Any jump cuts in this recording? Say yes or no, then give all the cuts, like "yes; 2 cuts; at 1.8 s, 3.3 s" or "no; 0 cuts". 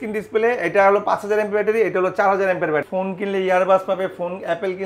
yes; 1 cut; at 2.9 s